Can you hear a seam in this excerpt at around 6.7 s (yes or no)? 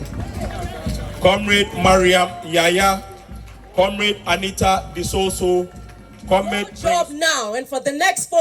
yes